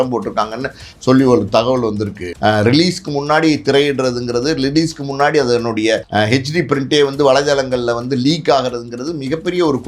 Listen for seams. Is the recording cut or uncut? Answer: cut